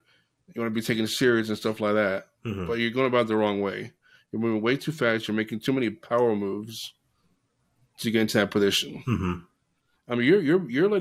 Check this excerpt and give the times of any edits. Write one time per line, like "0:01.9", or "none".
none